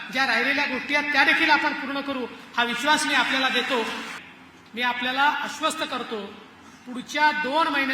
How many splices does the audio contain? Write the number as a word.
one